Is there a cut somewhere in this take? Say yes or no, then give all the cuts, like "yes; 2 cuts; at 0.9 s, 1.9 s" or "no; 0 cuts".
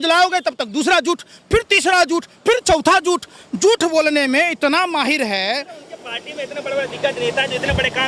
no; 0 cuts